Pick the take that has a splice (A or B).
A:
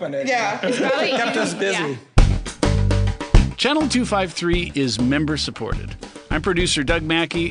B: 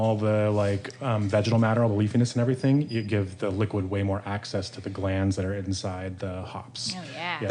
A